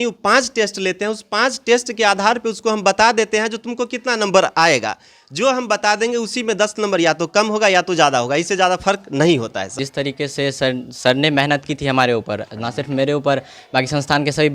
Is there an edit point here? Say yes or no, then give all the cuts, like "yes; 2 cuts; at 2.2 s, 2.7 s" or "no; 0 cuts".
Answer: yes; 1 cut; at 9.7 s